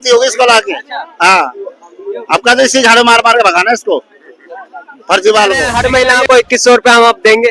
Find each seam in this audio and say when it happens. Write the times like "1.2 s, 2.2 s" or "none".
5.7 s